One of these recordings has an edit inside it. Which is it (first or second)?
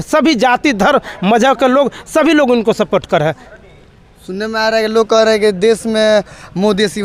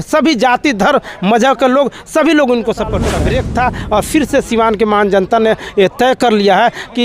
second